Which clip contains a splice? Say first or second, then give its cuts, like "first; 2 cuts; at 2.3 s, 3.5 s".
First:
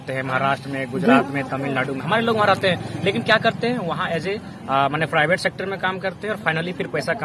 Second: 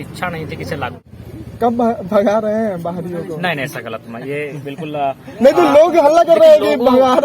second; 1 cut; at 1.0 s